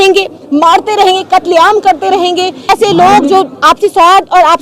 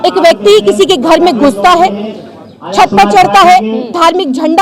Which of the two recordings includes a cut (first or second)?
first